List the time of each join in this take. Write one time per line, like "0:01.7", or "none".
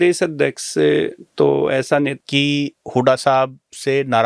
0:02.1